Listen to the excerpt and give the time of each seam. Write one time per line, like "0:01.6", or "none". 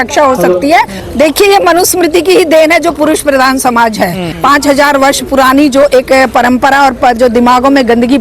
0:01.0